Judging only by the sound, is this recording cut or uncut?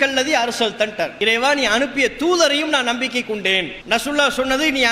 cut